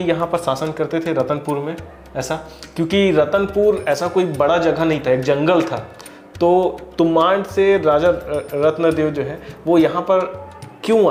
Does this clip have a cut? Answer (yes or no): no